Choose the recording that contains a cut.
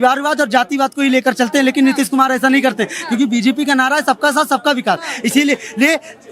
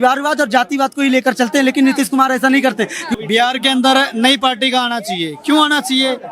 second; 1 cut; at 3.1 s

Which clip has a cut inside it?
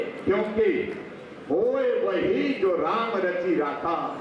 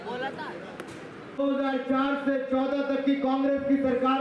second; 1 cut; at 1.4 s

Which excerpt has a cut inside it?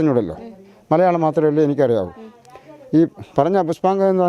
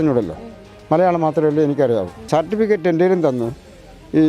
second; 1 cut; at 2.2 s

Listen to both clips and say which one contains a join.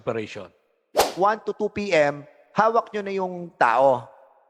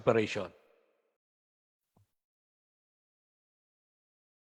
first; 1 cut; at 1.2 s

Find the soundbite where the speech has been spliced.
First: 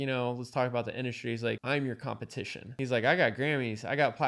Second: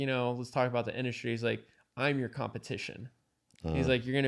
first; 2 cuts; at 1.6 s, 2.7 s

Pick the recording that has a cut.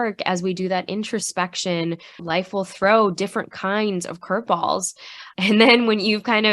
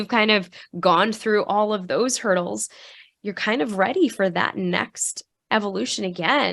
first; 2 cuts; at 2.2 s, 5.2 s

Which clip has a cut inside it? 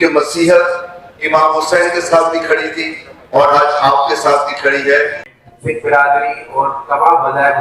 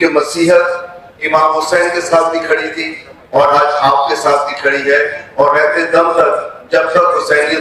first; 1 cut; at 5.2 s

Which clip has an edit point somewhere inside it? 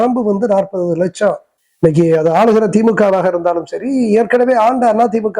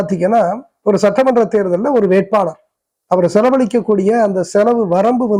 first; 1 cut; at 1.5 s

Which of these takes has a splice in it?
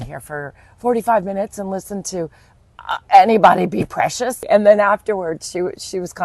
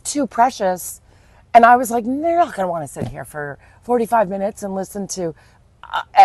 first; 1 cut; at 4.4 s

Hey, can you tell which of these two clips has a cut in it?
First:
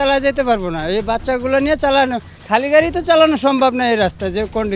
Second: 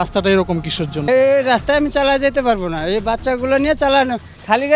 second; 1 cut; at 1.1 s

